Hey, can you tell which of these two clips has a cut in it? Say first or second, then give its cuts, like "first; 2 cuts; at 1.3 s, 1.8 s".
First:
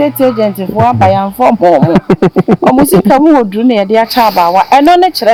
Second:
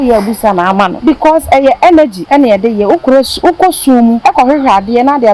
second; 3 cuts; at 0.9 s, 2.2 s, 4.2 s